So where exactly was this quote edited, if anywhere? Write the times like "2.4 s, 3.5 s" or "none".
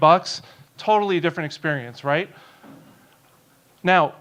none

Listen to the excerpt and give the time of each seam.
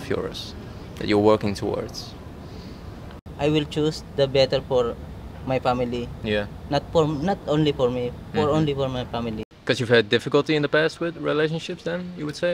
3.2 s, 9.5 s

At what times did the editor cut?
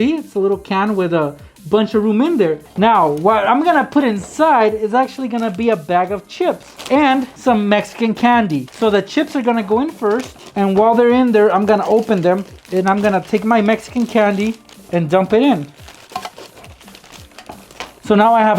2.6 s, 7.3 s, 8.7 s, 10.4 s, 12.5 s

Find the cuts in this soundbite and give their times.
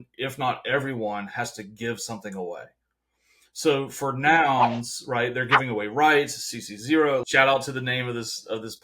7.2 s

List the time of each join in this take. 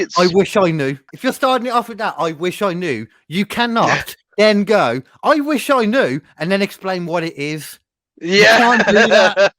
1.1 s

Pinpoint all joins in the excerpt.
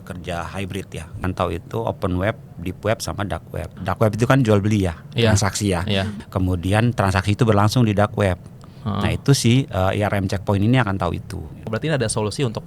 1.2 s, 3.7 s, 6.2 s, 11.6 s

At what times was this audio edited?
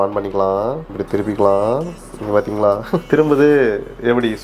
0.9 s, 3.0 s

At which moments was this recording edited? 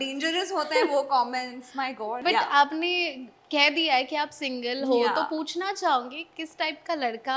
2.2 s

